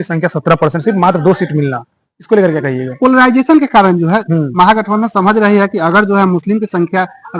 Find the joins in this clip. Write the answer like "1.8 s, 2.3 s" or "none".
none